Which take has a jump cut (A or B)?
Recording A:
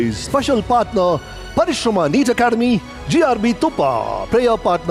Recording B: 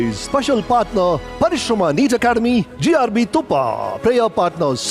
B